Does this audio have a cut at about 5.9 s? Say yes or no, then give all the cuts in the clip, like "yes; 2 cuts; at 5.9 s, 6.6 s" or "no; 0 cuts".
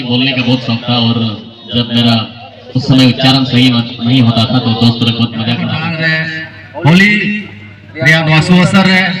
yes; 1 cut; at 5.9 s